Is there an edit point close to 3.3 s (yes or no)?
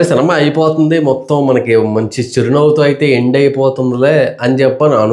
no